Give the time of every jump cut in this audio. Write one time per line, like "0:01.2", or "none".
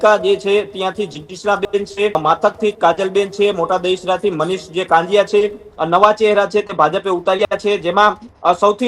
0:05.7

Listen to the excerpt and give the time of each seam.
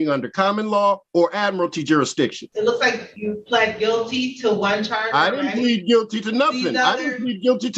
0:01.0
0:02.4
0:03.1

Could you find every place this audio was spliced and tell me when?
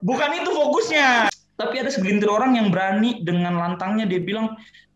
0:01.3

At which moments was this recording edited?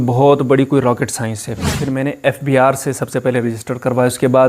0:01.8

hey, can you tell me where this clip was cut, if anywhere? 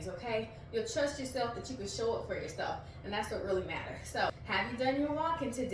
0:04.4

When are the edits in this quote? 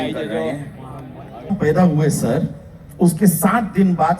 0:01.5

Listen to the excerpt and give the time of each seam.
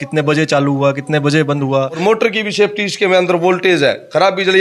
0:02.0

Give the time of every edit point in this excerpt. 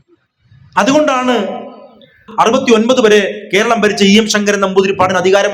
0:02.2

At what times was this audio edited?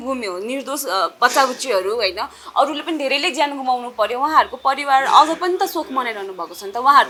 none

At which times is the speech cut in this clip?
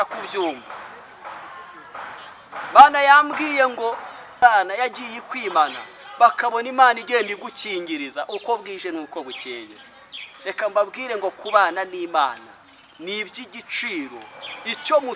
0:04.2

